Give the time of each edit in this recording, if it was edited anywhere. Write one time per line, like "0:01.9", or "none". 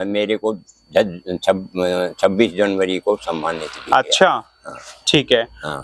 none